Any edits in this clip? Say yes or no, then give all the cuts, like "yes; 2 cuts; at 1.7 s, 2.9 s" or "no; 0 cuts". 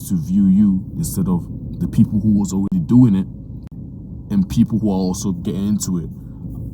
no; 0 cuts